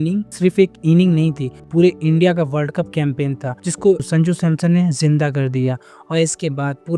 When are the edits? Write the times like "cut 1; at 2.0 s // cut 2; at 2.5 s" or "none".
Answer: cut 1; at 1.7 s